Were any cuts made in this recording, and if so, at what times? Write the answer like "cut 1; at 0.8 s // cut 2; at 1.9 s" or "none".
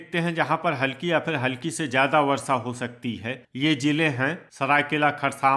cut 1; at 4.4 s